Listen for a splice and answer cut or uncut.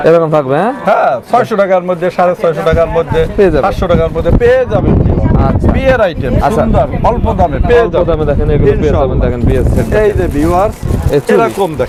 uncut